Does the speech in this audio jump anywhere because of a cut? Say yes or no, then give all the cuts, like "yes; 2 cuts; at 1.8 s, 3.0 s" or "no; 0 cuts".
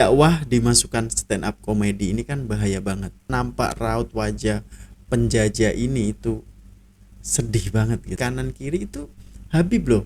yes; 2 cuts; at 3.3 s, 8.2 s